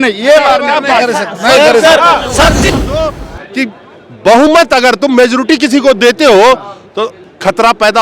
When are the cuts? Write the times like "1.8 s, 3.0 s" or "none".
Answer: 2.7 s